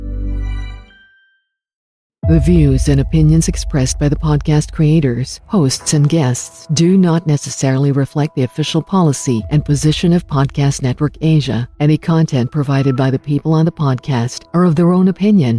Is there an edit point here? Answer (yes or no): yes